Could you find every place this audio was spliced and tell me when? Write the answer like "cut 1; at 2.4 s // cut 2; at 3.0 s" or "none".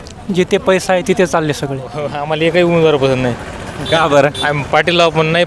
cut 1; at 2.2 s